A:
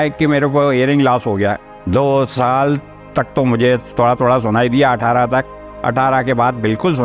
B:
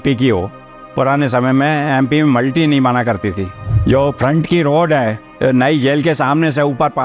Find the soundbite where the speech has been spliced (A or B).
B